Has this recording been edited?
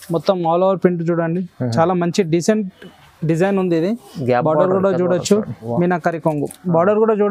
yes; 1 cut; at 5.6 s

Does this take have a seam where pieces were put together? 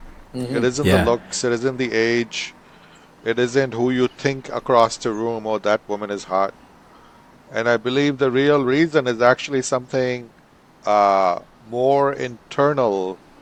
no; 0 cuts

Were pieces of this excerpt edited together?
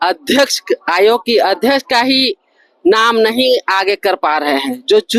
no; 0 cuts

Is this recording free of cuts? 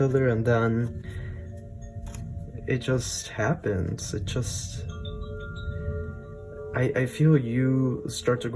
yes; 0 cuts

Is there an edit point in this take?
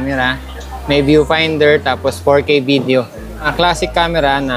yes; 1 cut; at 3.5 s

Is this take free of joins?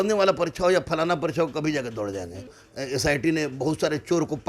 no; 1 cut; at 2.6 s

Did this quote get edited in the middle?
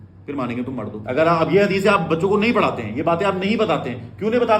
yes; 1 cut; at 1.0 s

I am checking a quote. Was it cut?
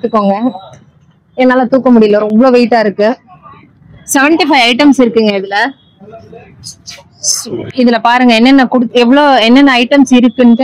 no; 0 cuts

